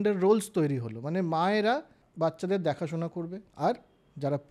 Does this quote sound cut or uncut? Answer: cut